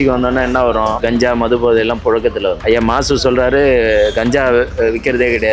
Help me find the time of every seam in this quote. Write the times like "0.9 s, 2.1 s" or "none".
1.0 s